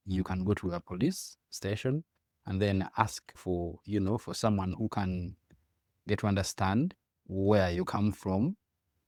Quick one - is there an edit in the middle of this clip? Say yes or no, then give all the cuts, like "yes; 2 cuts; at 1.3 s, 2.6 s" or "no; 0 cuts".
no; 0 cuts